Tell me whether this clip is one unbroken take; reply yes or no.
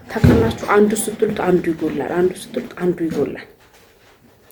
yes